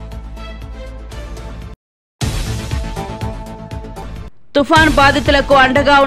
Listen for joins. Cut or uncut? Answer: cut